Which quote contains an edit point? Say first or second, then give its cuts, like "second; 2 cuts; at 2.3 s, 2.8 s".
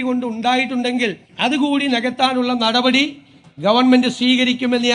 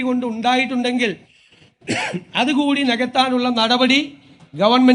first; 1 cut; at 1.3 s